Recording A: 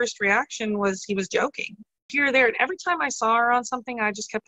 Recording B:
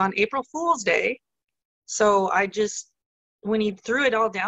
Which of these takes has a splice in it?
A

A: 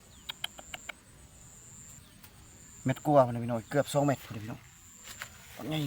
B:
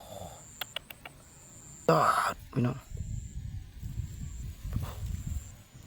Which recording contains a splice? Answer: B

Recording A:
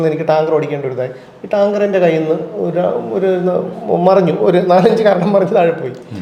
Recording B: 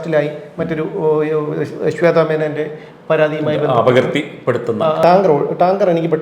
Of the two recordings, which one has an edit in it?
B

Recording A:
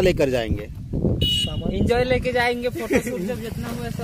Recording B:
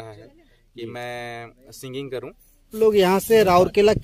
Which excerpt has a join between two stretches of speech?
B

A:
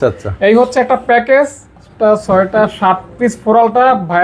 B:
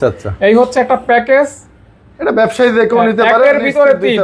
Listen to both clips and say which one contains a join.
A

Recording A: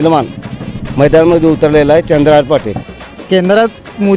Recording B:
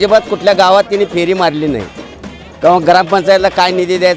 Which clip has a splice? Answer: A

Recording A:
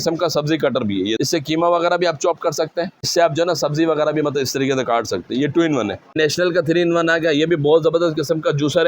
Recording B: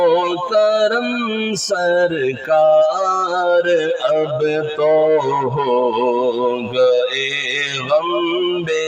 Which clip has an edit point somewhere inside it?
A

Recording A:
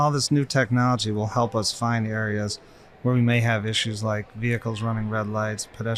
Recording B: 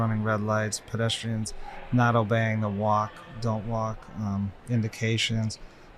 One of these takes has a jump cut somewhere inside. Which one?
B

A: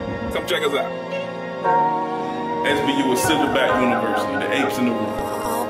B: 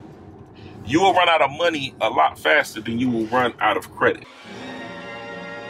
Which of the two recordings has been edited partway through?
B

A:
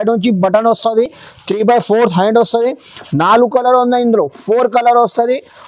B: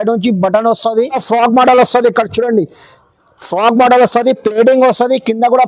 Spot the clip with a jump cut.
B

